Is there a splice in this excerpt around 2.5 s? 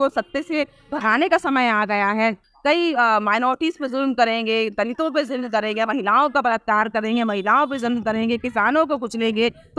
yes; 1 cut; at 2.5 s

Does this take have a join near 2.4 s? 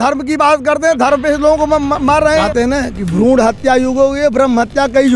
yes; 1 cut; at 2.4 s

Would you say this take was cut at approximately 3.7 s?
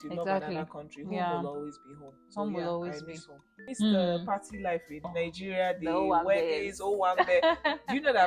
yes; 2 cuts; at 3.7 s, 5.0 s

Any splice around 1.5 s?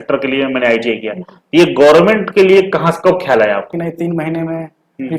no; 1 cut; at 3.7 s

